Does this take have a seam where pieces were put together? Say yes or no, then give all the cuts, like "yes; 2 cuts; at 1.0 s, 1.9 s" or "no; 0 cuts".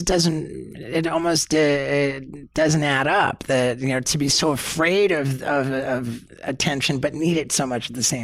no; 0 cuts